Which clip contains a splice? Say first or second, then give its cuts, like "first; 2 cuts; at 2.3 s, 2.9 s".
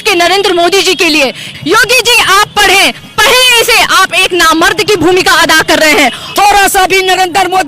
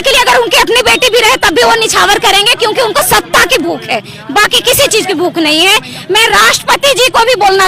first; 2 cuts; at 1.5 s, 6.3 s